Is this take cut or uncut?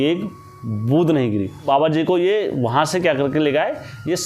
cut